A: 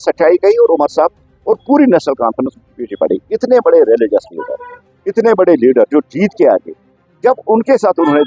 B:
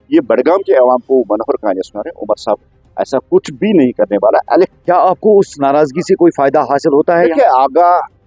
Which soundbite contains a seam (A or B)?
B